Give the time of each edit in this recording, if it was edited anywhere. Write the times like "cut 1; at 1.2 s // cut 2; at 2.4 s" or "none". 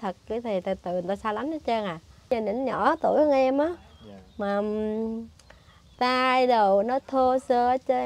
cut 1; at 2.3 s